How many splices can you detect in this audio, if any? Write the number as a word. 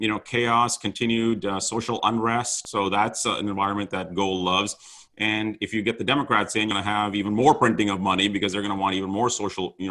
two